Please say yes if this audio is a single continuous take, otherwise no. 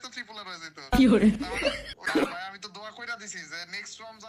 no